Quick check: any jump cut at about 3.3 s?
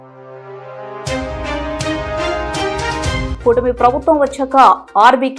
yes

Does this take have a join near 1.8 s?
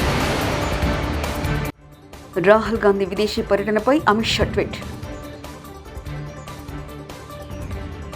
yes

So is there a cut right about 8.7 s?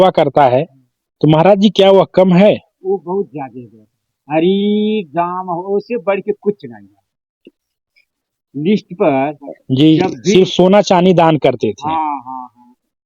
no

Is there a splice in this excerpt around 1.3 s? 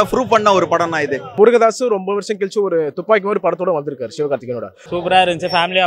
yes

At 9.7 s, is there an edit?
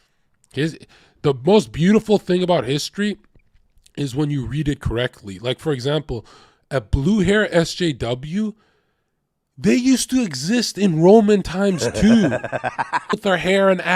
no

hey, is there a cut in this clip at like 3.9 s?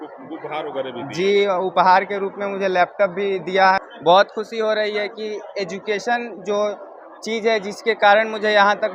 yes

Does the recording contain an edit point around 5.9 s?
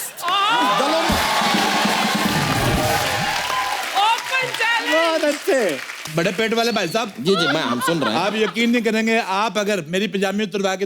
yes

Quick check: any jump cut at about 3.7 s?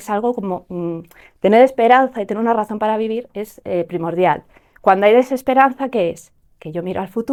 no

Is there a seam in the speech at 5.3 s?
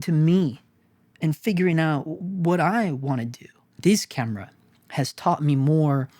no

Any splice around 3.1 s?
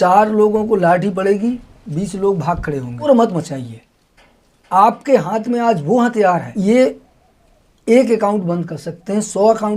yes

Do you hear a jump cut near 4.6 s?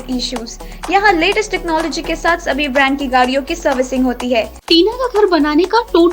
yes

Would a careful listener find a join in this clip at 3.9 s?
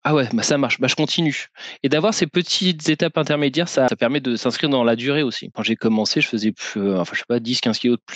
yes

